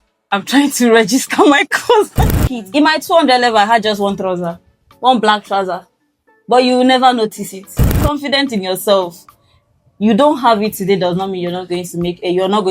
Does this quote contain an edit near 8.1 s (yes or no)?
yes